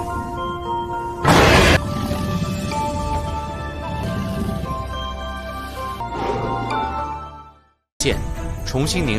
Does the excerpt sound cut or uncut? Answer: cut